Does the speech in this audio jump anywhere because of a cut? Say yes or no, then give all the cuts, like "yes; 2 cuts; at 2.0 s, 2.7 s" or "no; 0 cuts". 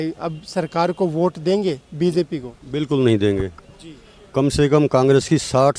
no; 0 cuts